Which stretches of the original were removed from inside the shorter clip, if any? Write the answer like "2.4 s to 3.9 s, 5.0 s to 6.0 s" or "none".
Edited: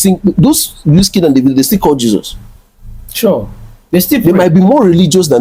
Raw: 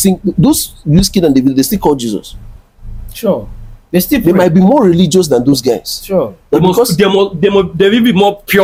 none